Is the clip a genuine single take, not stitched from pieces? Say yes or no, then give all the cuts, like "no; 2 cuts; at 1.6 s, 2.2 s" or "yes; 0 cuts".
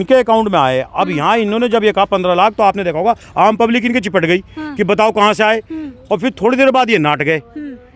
yes; 0 cuts